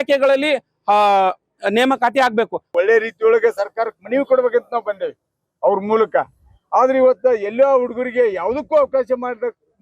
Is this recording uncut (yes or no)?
no